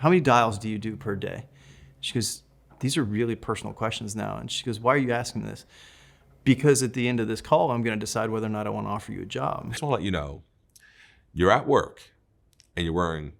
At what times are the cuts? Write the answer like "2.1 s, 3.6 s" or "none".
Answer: 9.8 s